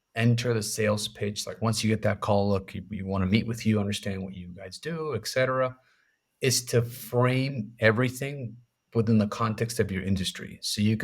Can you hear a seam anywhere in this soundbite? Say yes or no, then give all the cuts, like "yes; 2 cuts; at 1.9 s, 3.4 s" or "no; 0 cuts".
no; 0 cuts